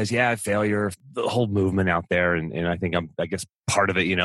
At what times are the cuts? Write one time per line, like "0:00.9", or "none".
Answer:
0:00.9

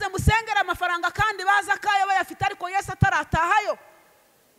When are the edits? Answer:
none

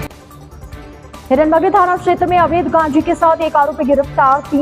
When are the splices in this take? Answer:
none

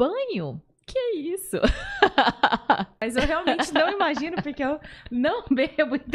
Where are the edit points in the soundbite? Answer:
0:03.0

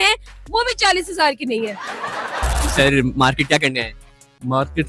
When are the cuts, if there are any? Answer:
0:02.6

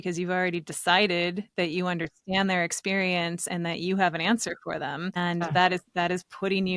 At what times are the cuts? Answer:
0:05.2

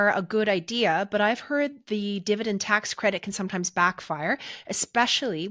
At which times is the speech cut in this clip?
none

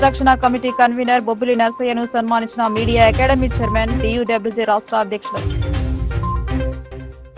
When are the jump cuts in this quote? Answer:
none

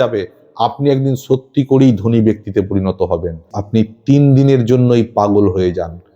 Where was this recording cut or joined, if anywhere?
0:03.5

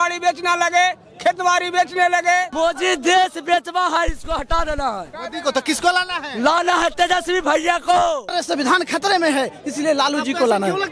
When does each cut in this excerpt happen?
0:02.5
0:08.3

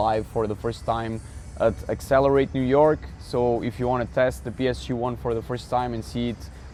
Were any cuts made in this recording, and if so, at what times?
none

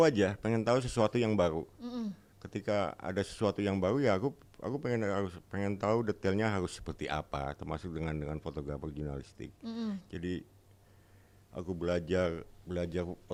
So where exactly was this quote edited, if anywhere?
none

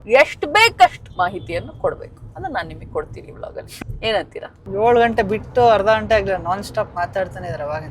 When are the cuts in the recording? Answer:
0:03.7
0:04.6

